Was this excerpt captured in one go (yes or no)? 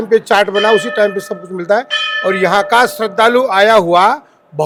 yes